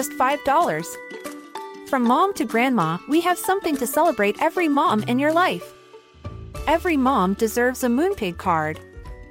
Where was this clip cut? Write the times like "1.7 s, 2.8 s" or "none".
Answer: none

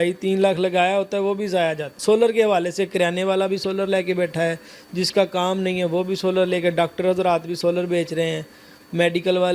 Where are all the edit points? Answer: 1.9 s

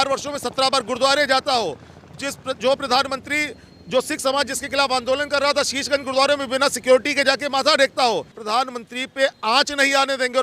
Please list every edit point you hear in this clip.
8.4 s

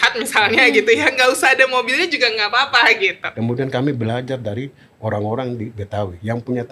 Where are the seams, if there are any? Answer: 3.2 s

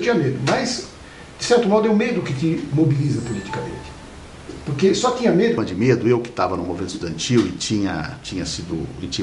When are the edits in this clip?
5.6 s

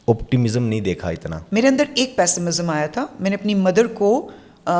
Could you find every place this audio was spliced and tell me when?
1.3 s

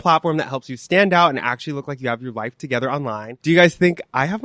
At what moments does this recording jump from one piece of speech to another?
3.3 s

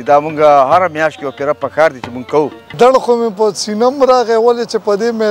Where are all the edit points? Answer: 2.7 s

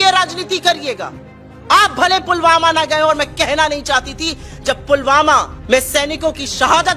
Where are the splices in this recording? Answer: 5.5 s

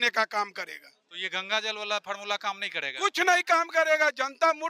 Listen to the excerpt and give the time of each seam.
none

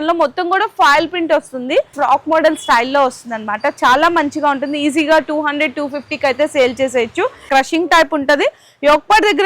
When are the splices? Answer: 1.9 s, 7.5 s

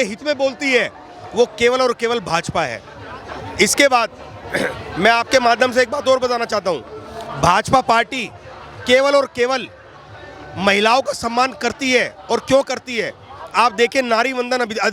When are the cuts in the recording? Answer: none

